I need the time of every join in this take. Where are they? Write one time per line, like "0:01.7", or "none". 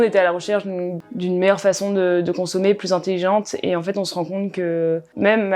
0:01.0